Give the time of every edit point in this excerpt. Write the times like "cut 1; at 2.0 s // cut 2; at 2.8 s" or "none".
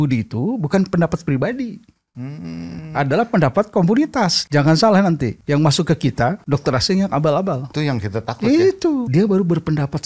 cut 1; at 4.4 s // cut 2; at 5.3 s // cut 3; at 6.4 s // cut 4; at 7.7 s // cut 5; at 9.1 s